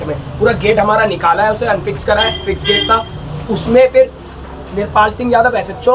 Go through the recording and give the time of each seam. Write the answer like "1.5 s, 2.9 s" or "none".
none